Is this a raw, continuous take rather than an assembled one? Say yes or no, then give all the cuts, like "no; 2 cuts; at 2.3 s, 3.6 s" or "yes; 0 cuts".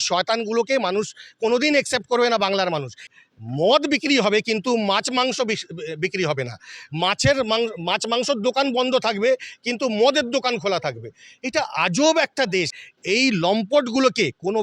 no; 2 cuts; at 3.1 s, 12.7 s